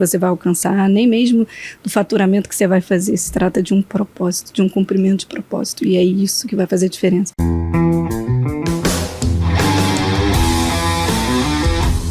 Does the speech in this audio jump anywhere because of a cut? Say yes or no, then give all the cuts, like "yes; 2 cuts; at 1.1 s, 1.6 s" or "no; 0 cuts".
yes; 1 cut; at 7.4 s